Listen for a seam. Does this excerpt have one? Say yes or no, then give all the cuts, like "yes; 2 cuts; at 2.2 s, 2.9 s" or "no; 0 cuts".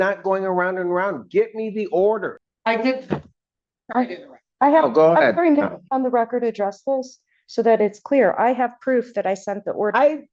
yes; 1 cut; at 2.5 s